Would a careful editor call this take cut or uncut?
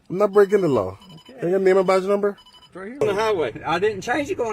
cut